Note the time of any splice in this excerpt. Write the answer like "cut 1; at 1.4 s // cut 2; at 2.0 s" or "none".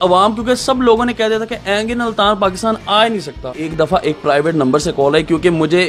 cut 1; at 3.7 s